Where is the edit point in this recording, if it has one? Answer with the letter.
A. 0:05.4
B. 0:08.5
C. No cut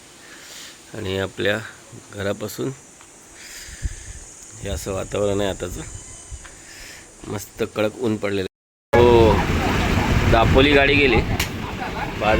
B